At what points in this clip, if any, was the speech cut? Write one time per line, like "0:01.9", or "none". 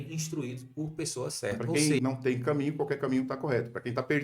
0:01.6